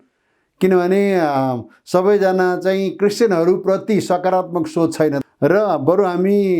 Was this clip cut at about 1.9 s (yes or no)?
no